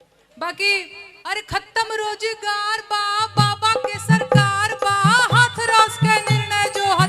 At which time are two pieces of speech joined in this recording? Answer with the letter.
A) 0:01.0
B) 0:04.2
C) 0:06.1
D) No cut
A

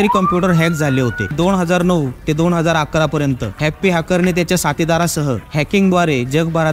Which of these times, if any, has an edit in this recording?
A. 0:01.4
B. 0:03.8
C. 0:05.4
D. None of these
A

